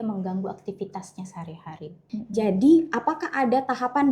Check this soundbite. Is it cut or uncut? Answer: cut